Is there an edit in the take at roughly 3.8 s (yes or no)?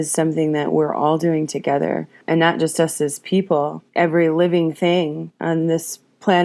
yes